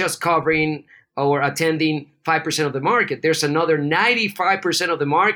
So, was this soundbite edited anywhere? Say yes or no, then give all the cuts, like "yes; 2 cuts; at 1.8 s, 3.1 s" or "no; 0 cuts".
no; 0 cuts